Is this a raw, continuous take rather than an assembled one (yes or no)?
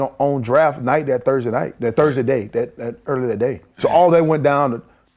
no